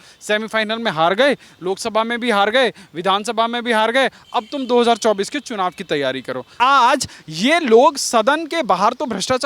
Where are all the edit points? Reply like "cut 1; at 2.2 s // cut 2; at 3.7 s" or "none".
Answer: cut 1; at 6.5 s